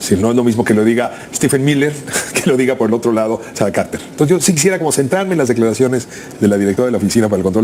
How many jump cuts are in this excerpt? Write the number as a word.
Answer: zero